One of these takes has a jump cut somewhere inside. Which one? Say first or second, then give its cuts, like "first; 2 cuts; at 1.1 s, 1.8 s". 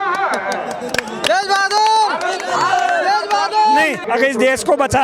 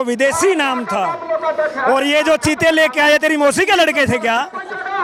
first; 1 cut; at 4.0 s